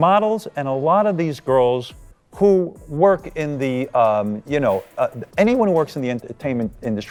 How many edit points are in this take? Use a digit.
0